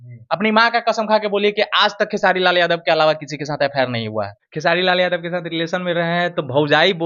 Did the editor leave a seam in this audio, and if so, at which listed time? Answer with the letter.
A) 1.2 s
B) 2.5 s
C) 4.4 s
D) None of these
C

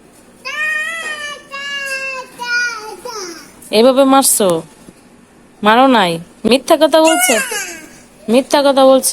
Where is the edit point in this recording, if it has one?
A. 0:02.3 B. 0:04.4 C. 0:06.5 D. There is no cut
C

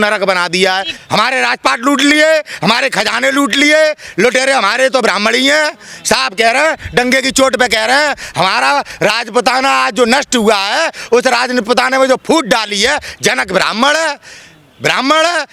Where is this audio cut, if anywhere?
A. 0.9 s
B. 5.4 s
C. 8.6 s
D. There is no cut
A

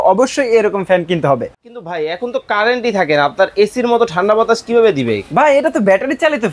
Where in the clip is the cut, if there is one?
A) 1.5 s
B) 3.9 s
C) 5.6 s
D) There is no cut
A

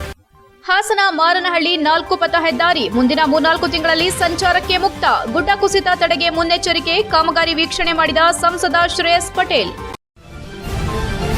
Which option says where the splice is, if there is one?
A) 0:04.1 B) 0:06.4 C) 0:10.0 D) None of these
C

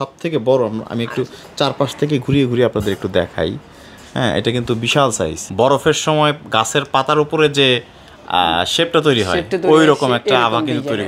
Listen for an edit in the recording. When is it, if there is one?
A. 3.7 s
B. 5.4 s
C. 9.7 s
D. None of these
B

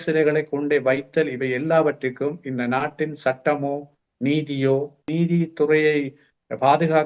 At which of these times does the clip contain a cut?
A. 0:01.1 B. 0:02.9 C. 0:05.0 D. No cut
C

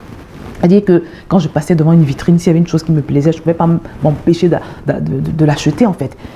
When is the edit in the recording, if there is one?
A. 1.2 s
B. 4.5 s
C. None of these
C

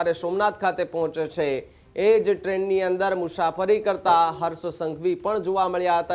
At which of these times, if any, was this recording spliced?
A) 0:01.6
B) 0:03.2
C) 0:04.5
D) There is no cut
D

